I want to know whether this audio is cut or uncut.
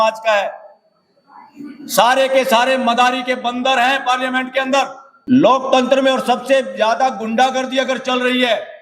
cut